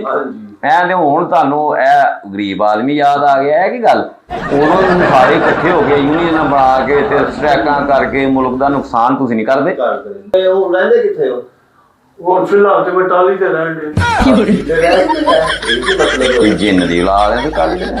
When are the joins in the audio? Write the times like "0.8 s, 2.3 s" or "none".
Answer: 10.1 s